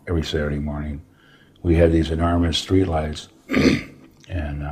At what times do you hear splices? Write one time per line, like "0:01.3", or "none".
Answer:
0:03.3